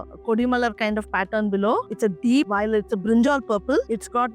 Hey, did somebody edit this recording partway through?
yes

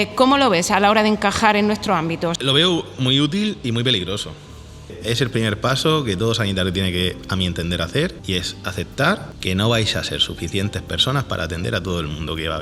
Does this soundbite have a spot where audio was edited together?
yes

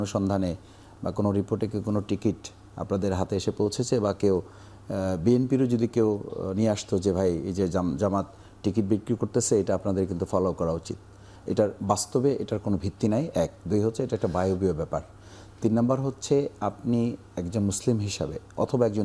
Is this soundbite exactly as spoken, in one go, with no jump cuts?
yes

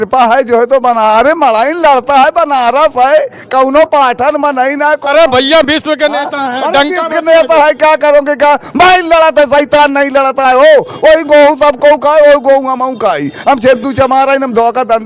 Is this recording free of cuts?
yes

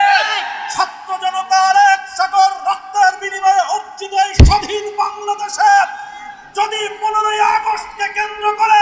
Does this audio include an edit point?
no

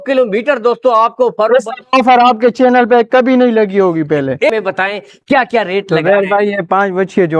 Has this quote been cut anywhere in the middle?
yes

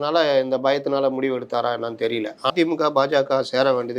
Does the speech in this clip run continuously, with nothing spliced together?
no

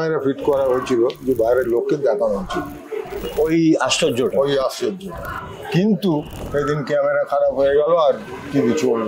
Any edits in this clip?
no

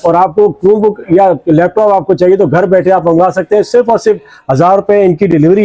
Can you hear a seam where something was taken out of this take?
no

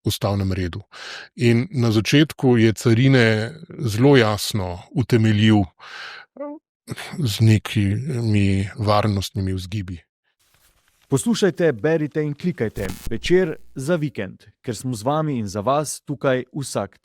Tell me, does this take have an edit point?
yes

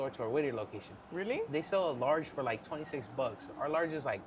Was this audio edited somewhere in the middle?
no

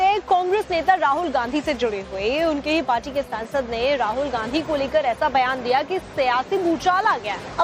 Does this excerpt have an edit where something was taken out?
yes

